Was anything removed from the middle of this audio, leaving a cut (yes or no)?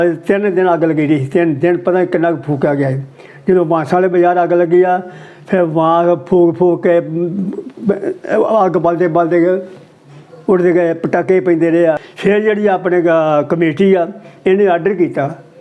yes